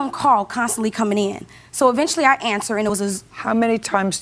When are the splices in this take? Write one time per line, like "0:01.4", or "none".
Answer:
0:03.3